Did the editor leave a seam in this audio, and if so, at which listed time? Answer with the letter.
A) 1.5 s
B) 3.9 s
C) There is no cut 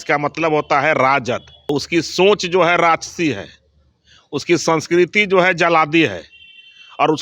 A